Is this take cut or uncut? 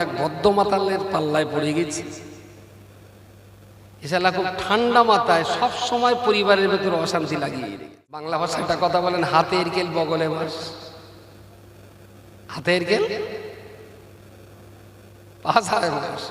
cut